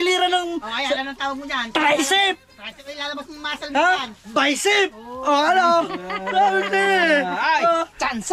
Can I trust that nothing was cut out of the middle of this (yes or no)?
yes